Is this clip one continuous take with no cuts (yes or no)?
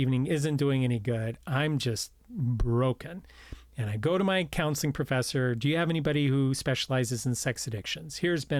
yes